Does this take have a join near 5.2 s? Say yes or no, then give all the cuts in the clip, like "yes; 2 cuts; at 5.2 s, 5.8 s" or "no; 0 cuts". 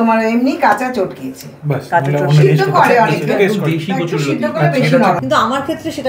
yes; 1 cut; at 5.2 s